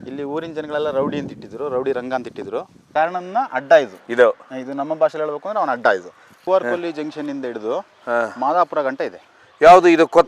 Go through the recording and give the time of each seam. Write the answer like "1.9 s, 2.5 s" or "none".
2.8 s, 4.0 s, 6.3 s